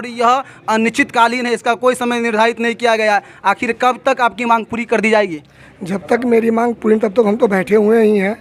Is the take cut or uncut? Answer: uncut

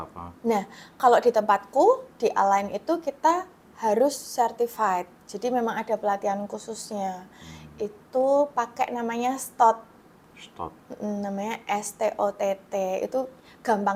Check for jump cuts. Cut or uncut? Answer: uncut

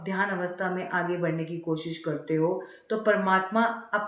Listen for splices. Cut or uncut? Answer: uncut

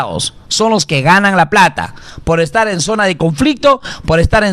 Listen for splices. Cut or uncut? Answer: uncut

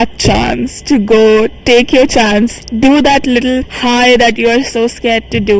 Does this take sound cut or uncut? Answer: cut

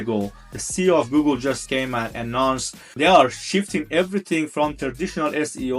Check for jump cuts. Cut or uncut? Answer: cut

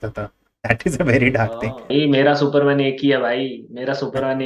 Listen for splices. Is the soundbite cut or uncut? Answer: cut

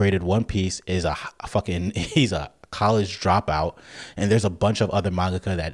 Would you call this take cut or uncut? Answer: uncut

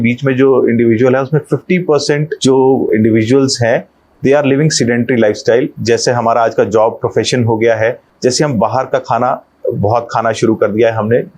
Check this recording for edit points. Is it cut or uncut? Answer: cut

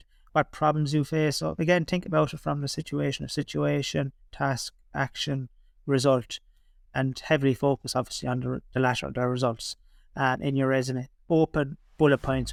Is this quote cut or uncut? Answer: uncut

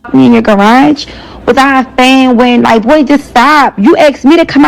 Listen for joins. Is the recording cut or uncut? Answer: cut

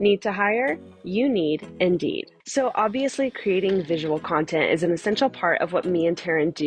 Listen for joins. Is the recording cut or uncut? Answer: cut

